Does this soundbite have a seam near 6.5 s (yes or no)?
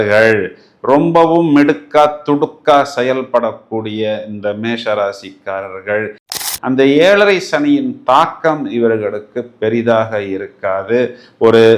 yes